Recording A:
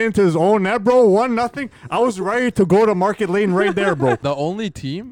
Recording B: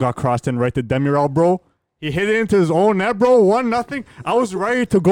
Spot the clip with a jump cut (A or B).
A